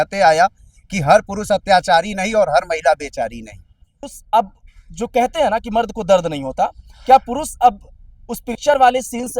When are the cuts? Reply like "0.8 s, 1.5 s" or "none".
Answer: 4.1 s